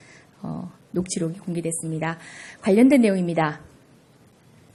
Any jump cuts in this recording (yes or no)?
no